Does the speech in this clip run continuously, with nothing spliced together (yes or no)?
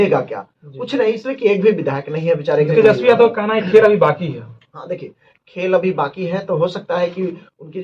no